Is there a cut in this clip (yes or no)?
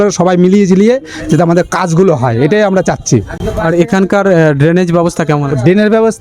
no